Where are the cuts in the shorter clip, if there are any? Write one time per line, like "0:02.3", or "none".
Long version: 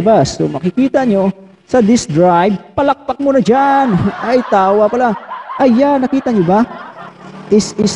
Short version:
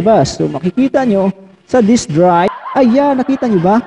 0:02.6